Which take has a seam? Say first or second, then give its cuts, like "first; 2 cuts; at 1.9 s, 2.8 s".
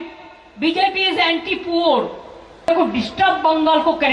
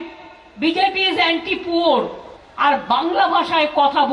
first; 1 cut; at 2.4 s